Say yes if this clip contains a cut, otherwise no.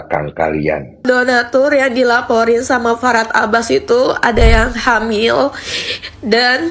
yes